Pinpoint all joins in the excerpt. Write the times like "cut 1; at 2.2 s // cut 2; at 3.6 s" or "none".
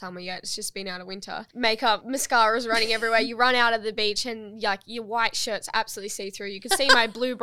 cut 1; at 1.4 s // cut 2; at 2.0 s